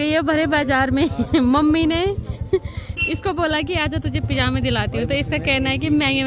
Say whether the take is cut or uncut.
uncut